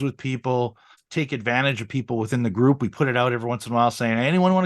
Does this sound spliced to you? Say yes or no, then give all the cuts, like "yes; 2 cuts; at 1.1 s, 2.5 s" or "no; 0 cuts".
yes; 1 cut; at 1.0 s